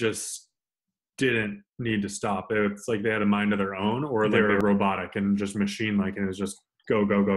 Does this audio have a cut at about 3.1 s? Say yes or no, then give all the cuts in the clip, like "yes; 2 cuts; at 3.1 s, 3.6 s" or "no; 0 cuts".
no; 1 cut; at 4.3 s